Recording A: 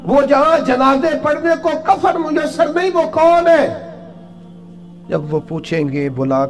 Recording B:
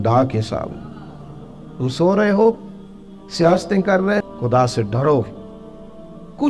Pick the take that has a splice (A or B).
B